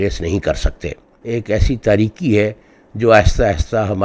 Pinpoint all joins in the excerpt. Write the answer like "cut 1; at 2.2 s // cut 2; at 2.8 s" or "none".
cut 1; at 1.2 s

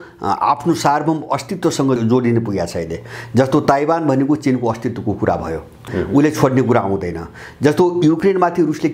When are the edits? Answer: cut 1; at 2.0 s // cut 2; at 5.9 s // cut 3; at 8.2 s

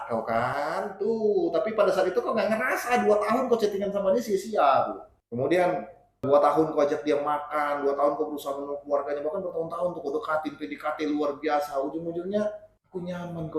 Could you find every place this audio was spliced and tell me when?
none

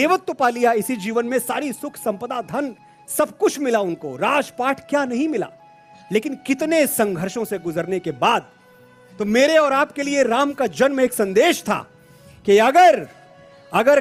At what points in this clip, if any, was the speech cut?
none

